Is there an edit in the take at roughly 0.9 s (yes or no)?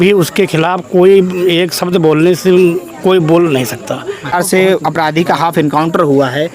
no